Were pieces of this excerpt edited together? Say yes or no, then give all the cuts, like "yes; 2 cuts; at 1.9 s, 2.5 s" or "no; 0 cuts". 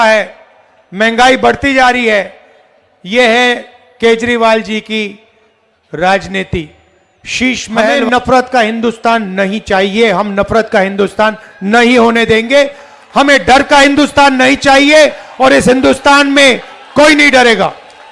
yes; 1 cut; at 8.0 s